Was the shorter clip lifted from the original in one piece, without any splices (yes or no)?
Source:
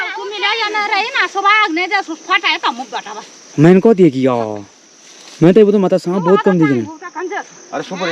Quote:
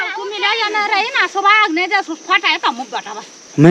yes